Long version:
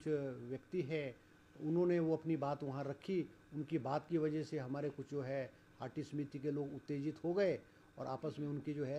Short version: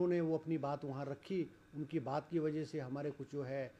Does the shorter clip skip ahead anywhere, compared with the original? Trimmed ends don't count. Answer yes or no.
no